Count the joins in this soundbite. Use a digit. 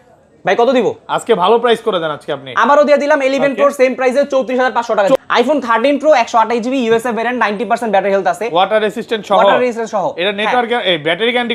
1